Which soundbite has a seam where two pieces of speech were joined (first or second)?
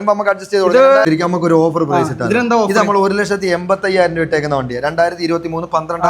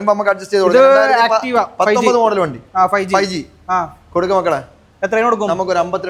first